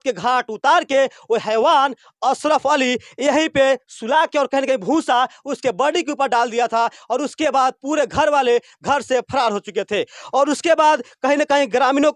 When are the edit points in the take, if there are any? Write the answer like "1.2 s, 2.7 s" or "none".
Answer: none